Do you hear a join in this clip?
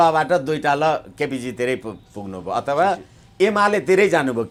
no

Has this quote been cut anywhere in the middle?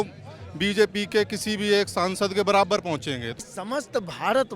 yes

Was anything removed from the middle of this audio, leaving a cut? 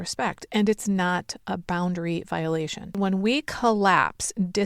yes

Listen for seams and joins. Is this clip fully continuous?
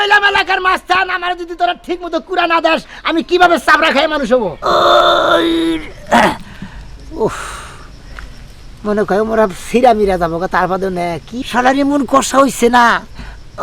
no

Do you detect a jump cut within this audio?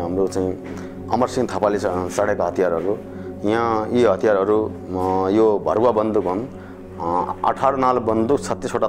no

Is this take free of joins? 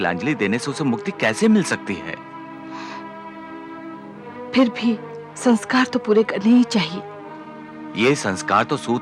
yes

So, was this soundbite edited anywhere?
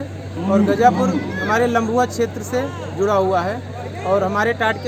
no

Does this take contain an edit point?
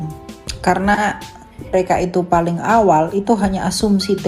yes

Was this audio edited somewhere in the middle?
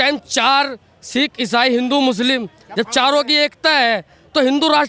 no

